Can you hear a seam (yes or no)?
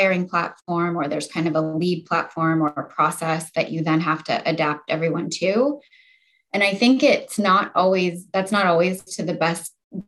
no